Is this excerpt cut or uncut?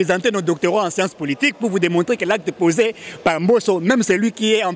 uncut